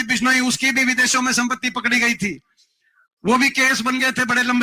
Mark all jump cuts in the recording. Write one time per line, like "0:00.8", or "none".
none